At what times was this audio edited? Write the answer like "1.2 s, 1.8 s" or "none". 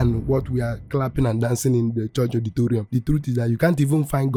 none